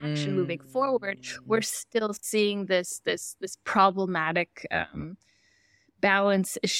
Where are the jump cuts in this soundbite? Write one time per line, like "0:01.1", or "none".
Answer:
none